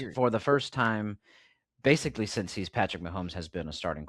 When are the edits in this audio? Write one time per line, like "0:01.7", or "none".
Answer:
none

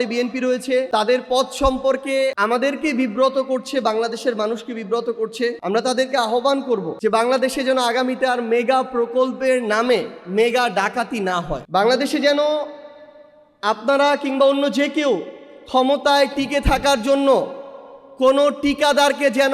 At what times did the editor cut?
0:00.9
0:02.4
0:05.6
0:06.9
0:11.6

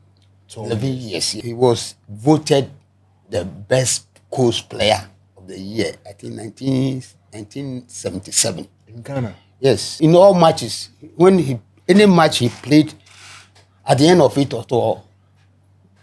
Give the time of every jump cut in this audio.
0:01.4
0:09.9

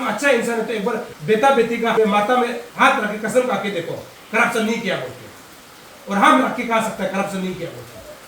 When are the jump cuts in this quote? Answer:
0:01.1
0:02.0
0:02.6

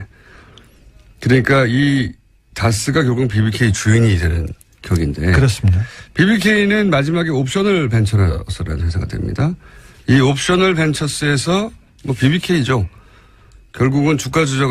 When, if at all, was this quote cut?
0:12.3

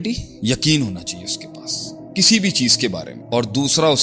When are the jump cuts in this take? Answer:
0:03.1

